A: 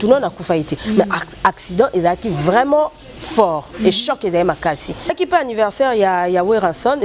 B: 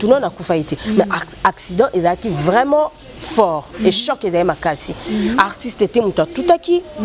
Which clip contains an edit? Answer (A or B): A